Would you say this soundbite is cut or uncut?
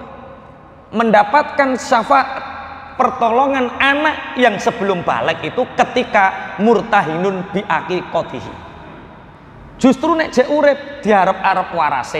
uncut